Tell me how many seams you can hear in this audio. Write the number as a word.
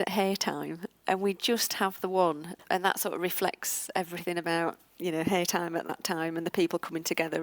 two